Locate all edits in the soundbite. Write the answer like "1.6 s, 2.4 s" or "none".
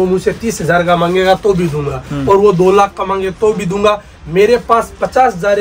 none